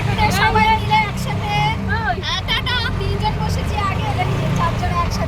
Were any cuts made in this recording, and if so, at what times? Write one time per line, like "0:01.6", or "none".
none